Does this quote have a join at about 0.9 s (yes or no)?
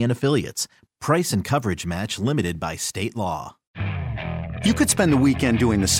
no